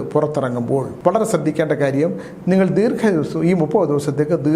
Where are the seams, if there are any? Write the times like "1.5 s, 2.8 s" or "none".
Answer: 0.9 s

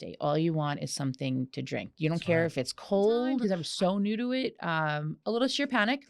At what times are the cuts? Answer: 3.4 s

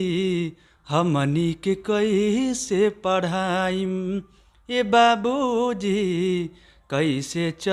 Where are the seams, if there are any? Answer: none

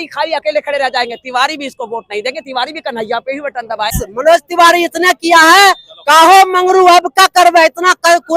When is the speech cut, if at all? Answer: 4.0 s

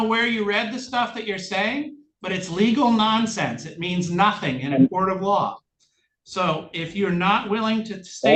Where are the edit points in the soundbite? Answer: none

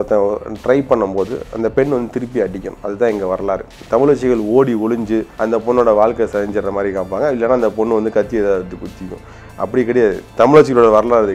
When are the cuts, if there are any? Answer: 3.7 s, 5.3 s, 10.2 s

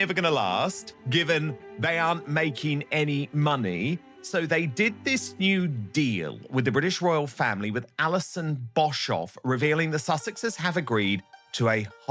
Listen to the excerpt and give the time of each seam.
0.9 s, 1.6 s

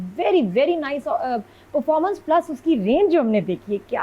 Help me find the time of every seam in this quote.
none

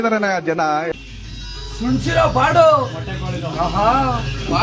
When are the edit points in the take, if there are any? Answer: 0.9 s

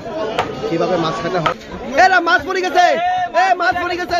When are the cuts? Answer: 1.6 s

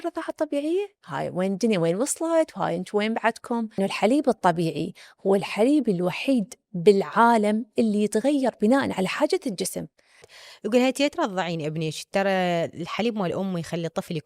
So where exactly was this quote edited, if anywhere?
3.7 s, 10.4 s

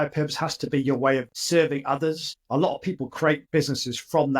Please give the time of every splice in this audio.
2.4 s, 3.4 s

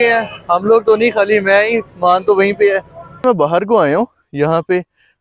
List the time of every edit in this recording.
3.2 s

